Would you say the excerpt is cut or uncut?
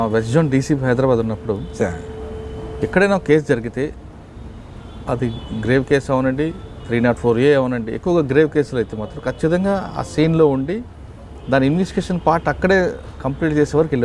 uncut